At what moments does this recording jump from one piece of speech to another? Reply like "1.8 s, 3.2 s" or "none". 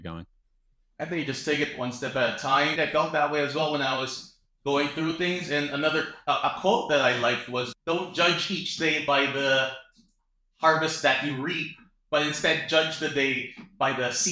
2.8 s, 7.7 s